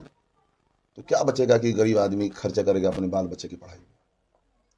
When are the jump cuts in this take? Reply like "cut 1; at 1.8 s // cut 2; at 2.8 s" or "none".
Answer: none

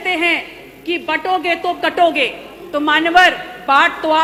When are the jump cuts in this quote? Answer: none

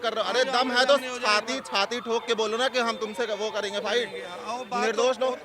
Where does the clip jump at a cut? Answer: none

